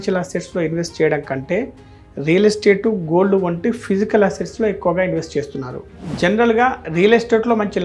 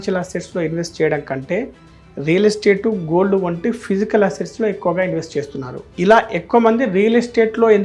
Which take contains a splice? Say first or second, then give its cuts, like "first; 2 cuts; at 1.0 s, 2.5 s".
first; 1 cut; at 5.8 s